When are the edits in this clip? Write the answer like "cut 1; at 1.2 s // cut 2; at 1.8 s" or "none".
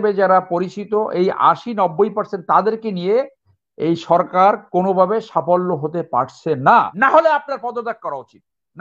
cut 1; at 6.9 s

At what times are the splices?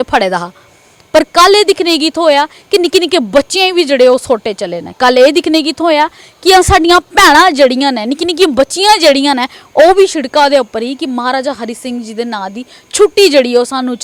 none

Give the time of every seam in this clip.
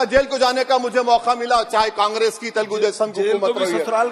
none

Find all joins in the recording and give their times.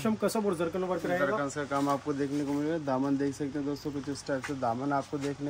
none

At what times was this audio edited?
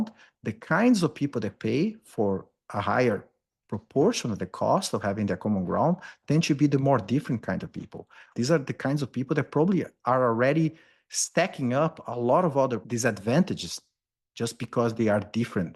cut 1; at 8.3 s // cut 2; at 12.8 s

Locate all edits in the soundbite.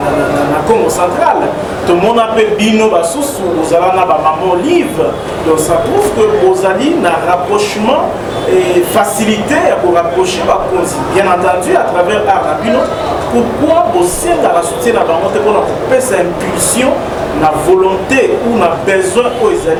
none

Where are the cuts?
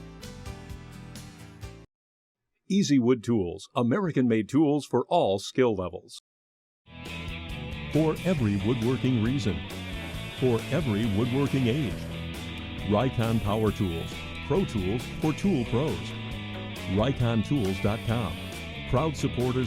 cut 1; at 1.5 s

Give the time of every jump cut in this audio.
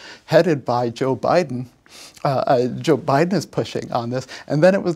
none

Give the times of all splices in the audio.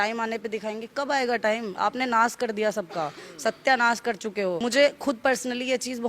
cut 1; at 4.6 s

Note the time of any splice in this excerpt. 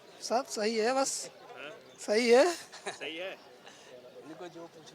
none

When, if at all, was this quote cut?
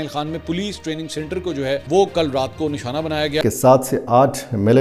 cut 1; at 1.8 s // cut 2; at 3.4 s

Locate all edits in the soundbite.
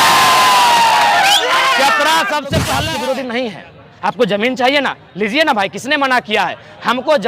cut 1; at 2.8 s

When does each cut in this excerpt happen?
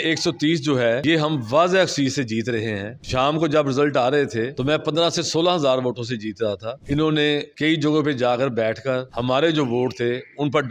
cut 1; at 4.5 s // cut 2; at 6.7 s

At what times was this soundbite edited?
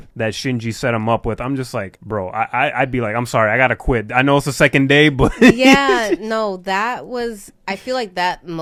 none

